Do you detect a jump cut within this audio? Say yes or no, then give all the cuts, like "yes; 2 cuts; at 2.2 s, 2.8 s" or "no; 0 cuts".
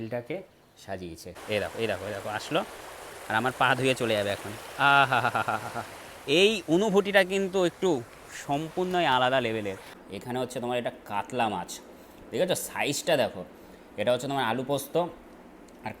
yes; 2 cuts; at 1.4 s, 9.9 s